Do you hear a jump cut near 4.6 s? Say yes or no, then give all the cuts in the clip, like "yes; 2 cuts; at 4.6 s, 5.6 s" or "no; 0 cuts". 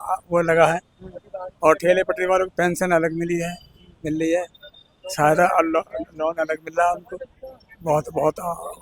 no; 0 cuts